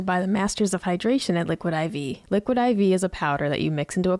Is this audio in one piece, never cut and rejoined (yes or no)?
no